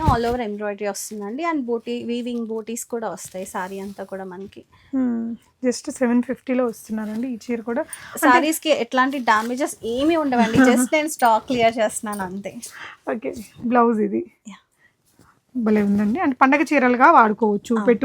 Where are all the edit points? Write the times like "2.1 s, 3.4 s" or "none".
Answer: none